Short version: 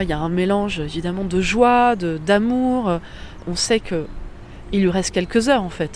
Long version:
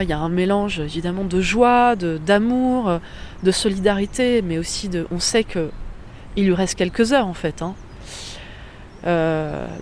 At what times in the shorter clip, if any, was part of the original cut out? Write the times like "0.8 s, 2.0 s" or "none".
3.4 s

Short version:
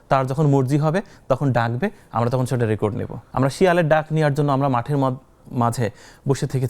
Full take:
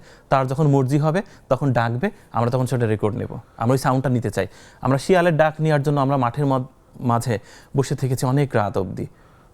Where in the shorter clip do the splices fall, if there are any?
3.2 s

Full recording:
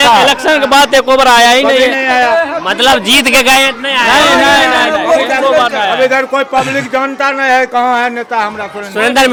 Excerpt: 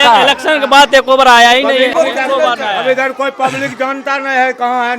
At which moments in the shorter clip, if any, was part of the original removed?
1.9 s

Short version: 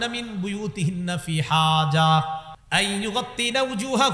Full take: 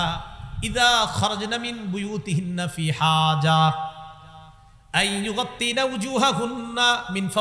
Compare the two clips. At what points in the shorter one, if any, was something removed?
2.5 s

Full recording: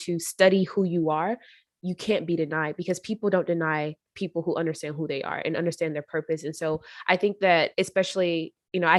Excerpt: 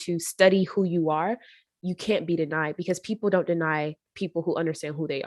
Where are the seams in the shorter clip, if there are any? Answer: none

